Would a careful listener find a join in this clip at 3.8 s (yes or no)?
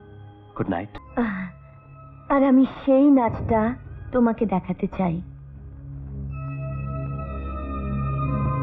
no